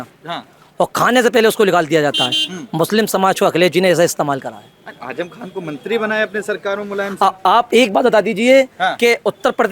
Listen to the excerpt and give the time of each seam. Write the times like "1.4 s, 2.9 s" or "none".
none